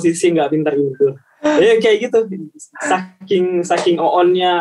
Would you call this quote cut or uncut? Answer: uncut